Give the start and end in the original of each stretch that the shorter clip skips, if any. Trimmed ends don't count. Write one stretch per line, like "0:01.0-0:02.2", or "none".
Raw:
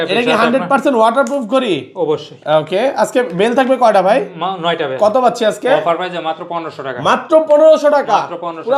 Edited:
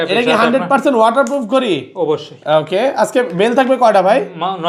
none